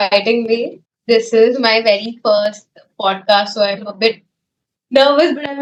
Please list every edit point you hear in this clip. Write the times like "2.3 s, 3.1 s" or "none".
none